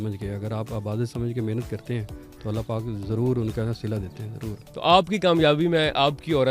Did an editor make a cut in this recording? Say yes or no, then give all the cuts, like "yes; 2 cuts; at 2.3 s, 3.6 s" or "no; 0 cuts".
yes; 1 cut; at 4.6 s